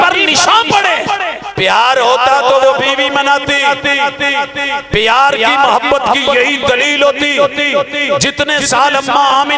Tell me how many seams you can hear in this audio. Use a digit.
1